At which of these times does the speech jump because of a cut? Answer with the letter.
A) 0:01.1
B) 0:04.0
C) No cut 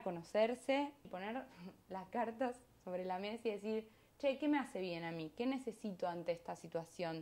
A